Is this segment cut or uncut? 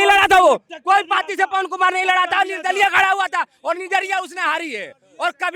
uncut